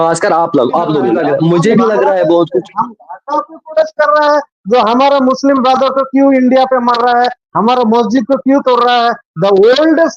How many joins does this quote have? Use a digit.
1